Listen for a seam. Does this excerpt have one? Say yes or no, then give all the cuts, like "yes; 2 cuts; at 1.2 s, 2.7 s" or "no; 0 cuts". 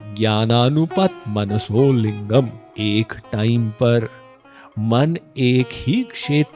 yes; 1 cut; at 2.6 s